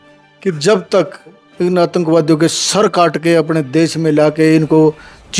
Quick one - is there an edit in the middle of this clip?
yes; 1 cut; at 1.4 s

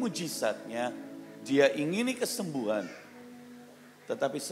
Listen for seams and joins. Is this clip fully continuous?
yes; 0 cuts

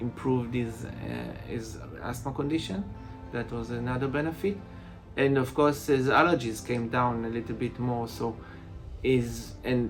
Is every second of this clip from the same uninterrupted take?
yes; 0 cuts

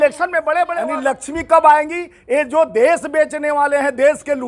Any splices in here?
yes; 1 cut; at 1.0 s

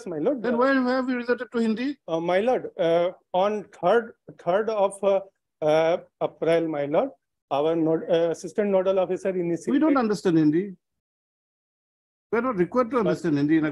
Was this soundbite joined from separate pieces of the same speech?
no; 0 cuts

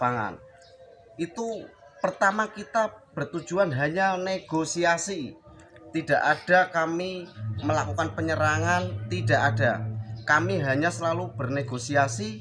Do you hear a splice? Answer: no; 0 cuts

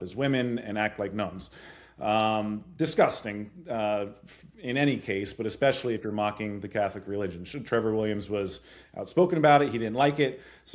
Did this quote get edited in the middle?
no; 0 cuts

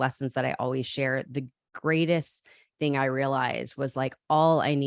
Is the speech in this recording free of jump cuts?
yes; 0 cuts

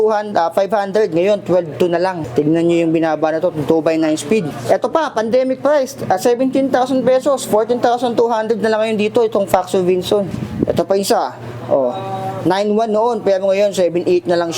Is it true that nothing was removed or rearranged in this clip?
no; 3 cuts; at 2.2 s, 4.5 s, 10.4 s

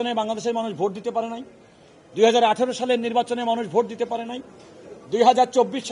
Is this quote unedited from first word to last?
yes; 0 cuts

